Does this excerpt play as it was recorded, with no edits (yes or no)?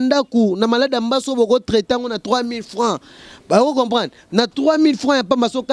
yes